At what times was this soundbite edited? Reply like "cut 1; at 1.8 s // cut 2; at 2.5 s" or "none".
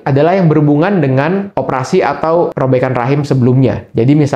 cut 1; at 2.5 s